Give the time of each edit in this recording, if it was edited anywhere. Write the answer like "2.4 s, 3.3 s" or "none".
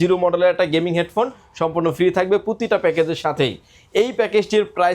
none